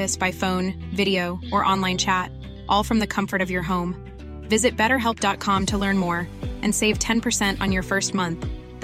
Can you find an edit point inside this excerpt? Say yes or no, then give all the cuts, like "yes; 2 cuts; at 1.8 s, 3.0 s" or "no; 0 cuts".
no; 0 cuts